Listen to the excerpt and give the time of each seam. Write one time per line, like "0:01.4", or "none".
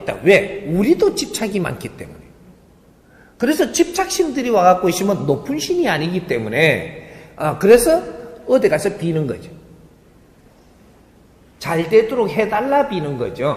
none